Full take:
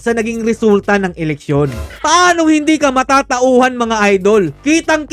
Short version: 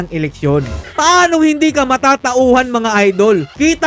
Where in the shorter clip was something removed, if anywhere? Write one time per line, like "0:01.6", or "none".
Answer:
none